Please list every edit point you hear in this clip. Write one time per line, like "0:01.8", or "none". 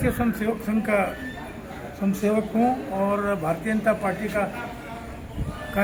none